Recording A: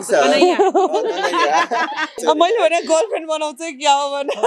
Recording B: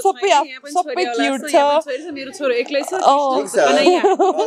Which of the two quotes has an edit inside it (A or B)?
A